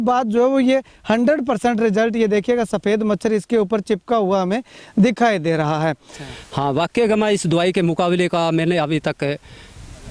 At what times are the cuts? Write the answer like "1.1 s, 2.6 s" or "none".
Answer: 6.1 s